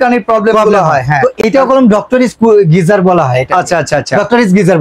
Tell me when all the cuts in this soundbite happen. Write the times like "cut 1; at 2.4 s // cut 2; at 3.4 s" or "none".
cut 1; at 1.4 s